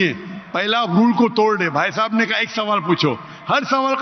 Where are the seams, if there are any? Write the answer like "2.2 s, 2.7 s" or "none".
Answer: none